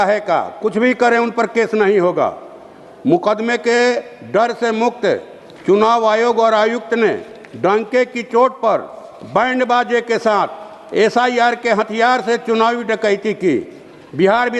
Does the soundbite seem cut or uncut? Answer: uncut